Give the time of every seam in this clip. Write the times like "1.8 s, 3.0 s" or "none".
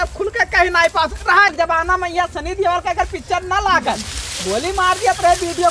1.5 s